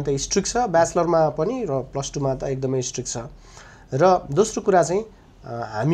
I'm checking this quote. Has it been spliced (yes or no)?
no